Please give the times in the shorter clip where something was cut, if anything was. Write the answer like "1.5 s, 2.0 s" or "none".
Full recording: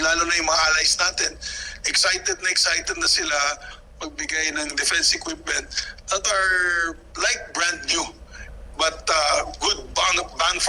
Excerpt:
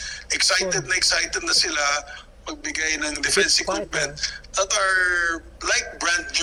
none